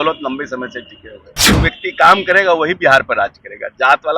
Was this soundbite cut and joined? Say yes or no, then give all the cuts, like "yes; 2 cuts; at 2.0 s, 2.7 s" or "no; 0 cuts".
yes; 1 cut; at 1.3 s